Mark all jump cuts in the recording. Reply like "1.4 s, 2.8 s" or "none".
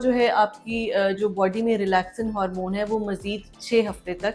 none

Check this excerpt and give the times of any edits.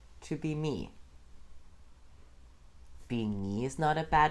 none

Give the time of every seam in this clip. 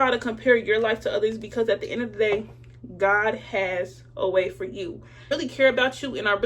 5.3 s

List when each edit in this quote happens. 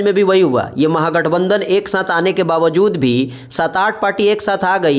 none

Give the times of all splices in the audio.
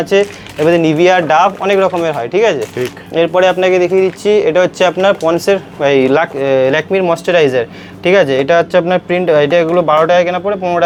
none

